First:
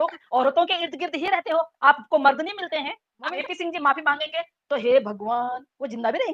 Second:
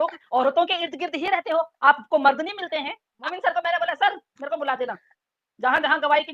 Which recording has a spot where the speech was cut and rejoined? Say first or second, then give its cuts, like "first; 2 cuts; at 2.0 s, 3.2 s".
first; 1 cut; at 3.3 s